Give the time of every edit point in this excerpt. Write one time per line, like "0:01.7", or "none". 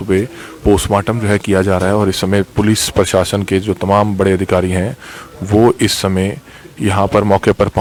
none

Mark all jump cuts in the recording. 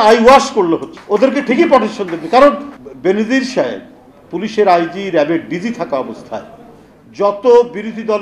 0:00.9
0:02.7

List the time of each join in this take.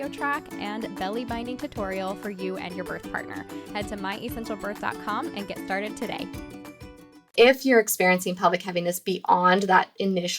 0:07.3

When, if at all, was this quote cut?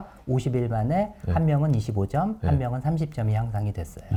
none

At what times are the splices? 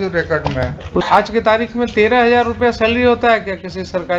0:01.1

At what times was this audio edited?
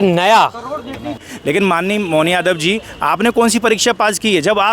0:01.3

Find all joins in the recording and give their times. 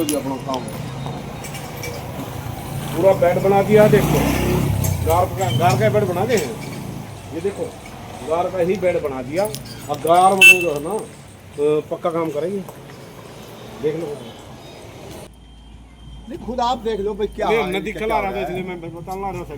0:15.3

